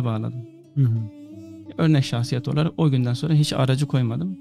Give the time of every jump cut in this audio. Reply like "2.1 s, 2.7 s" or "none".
none